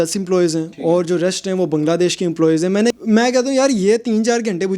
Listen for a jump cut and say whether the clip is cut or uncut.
cut